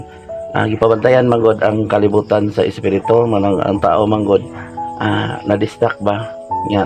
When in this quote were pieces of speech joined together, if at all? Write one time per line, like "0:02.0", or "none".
none